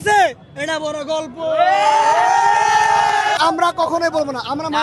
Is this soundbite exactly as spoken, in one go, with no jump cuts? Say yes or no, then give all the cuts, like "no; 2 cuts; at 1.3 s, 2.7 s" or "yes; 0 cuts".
no; 1 cut; at 3.4 s